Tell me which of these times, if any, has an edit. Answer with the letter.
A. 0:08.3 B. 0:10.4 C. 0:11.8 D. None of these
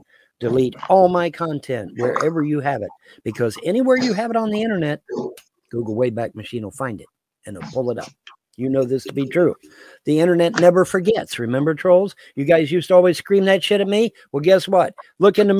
D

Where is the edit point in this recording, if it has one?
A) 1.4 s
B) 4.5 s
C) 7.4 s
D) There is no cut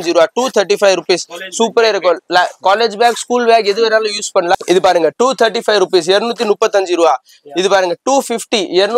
B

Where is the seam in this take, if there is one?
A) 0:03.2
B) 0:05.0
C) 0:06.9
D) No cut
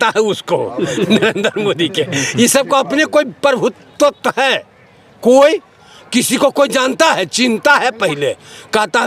D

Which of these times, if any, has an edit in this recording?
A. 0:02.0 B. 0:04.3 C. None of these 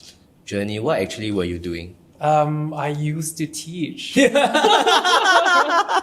A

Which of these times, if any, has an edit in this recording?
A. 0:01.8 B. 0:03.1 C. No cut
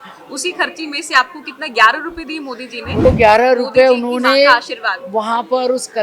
B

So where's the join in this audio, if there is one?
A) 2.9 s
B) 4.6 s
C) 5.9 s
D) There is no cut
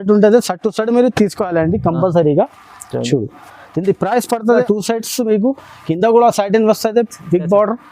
B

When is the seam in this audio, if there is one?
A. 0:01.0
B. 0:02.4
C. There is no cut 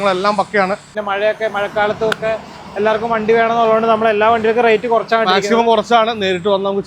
A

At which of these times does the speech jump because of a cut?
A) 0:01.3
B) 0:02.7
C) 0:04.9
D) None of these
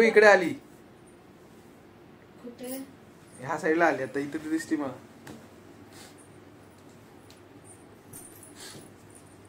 D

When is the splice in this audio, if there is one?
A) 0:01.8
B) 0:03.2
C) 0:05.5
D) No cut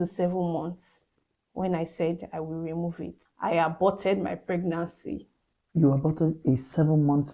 B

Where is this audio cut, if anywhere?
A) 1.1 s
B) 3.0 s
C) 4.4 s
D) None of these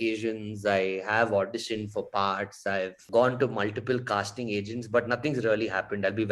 B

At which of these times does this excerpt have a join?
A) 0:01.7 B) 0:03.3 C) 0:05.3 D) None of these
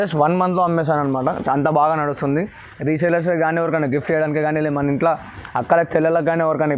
D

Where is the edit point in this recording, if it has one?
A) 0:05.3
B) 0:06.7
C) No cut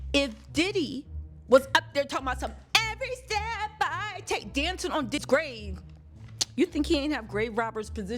C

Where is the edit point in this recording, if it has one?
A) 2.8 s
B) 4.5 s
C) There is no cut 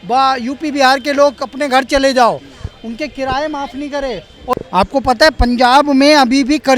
B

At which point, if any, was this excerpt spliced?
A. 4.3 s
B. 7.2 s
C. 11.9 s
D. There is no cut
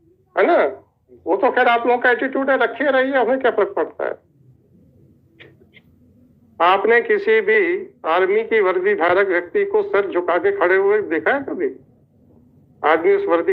A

